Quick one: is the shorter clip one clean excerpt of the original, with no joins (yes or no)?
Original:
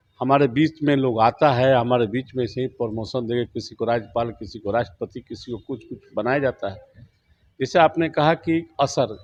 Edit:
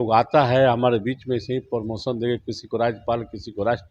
yes